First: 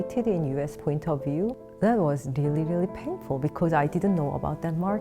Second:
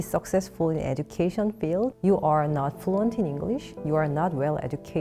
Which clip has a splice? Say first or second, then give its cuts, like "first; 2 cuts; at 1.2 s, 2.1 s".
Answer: first; 1 cut; at 1.6 s